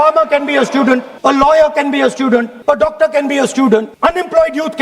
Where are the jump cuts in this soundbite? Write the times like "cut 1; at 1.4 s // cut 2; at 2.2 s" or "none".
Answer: cut 1; at 1.1 s // cut 2; at 2.5 s // cut 3; at 3.9 s